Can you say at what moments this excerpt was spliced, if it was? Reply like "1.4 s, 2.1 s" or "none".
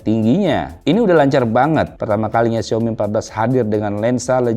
2.0 s